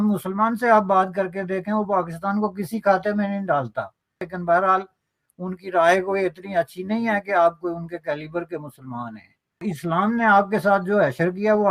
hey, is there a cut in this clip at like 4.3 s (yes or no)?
yes